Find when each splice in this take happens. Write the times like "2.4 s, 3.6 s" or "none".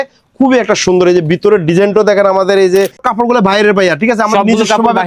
3.0 s